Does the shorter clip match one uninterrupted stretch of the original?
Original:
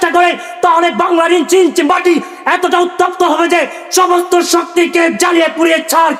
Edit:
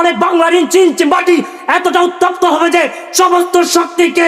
yes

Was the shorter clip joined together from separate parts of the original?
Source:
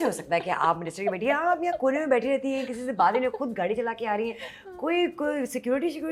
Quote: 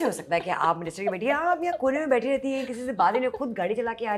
no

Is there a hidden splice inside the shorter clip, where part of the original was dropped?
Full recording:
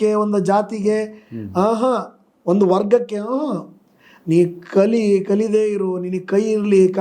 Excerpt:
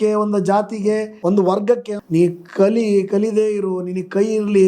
yes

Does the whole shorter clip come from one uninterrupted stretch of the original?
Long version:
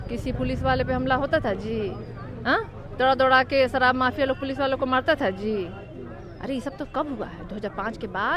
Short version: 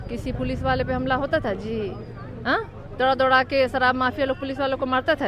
yes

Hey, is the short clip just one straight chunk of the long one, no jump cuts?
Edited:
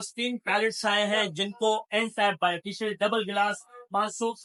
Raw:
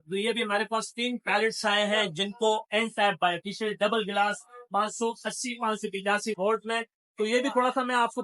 yes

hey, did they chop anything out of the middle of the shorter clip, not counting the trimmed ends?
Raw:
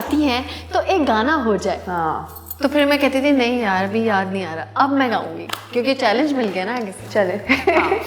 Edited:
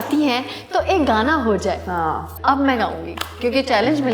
yes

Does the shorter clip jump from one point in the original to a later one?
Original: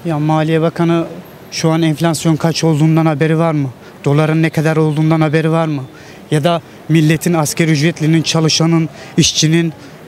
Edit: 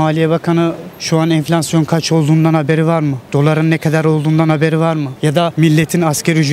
yes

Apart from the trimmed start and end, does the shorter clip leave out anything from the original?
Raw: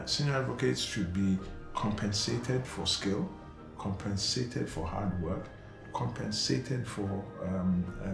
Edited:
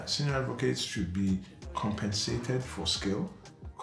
no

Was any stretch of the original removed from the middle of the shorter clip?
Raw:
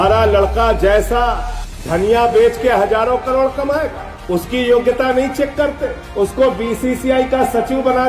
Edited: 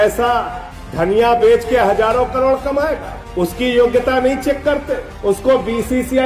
no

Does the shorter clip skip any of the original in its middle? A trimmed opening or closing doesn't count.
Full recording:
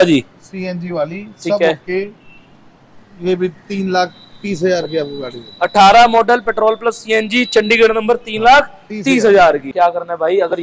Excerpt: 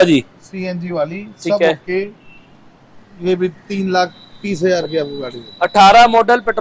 no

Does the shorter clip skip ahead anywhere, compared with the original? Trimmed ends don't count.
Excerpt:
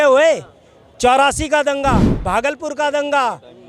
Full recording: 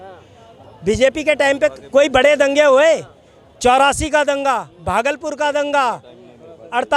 no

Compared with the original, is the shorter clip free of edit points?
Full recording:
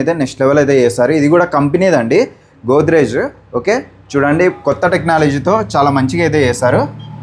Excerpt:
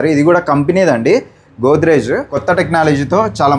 no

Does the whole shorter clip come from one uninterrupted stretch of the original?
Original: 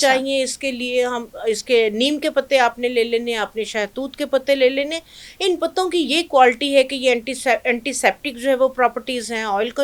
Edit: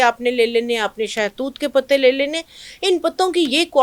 yes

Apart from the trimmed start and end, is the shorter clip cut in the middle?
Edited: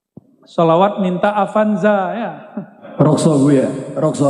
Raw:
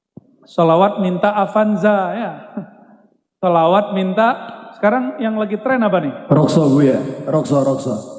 yes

